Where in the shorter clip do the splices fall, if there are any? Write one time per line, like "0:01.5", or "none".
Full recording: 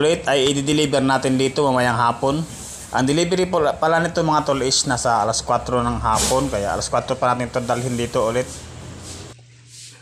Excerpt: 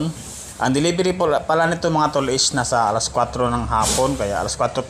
none